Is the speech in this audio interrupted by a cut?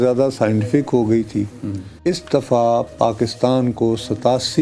no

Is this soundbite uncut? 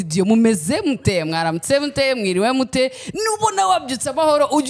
yes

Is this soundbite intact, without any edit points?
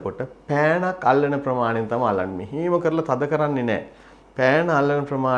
yes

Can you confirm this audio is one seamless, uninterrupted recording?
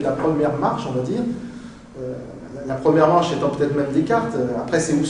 no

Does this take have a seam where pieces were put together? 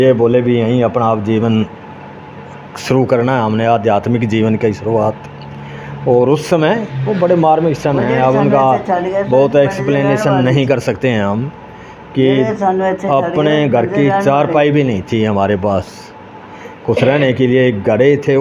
no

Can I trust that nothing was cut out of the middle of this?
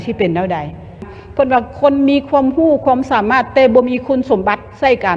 no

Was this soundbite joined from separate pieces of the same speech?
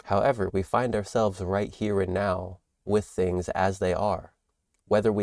no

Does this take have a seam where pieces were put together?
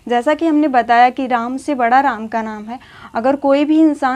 no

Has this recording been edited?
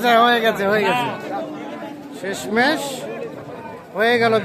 no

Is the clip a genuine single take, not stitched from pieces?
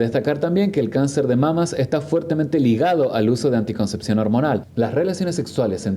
no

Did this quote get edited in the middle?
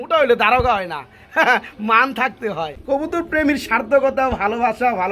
yes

